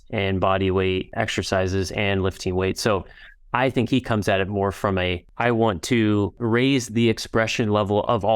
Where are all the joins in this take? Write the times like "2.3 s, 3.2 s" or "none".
1.1 s, 5.2 s, 6.4 s